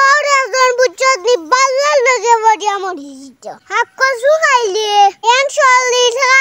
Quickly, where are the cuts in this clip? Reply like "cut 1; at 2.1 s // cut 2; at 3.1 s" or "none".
none